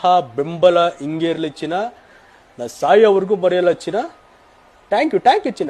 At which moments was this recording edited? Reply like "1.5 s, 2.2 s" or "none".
none